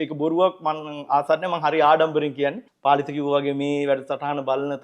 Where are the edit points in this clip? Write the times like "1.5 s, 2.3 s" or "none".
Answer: 2.7 s